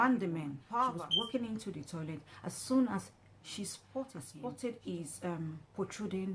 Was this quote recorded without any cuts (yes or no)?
no